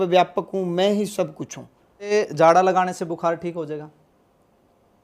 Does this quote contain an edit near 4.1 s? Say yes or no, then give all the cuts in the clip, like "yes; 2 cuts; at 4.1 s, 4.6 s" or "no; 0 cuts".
no; 1 cut; at 2.1 s